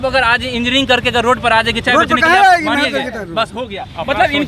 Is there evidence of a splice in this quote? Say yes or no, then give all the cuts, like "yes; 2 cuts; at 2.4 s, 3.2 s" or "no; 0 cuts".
no; 0 cuts